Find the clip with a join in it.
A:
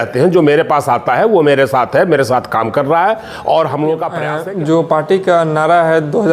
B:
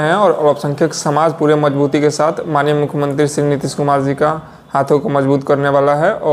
A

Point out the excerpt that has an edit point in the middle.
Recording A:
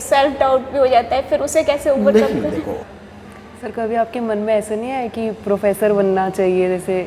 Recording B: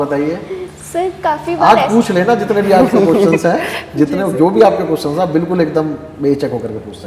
A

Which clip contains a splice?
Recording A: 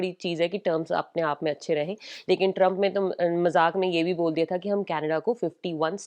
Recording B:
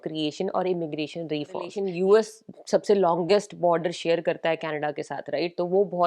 B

